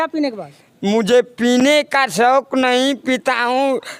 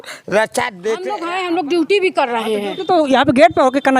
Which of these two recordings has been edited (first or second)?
second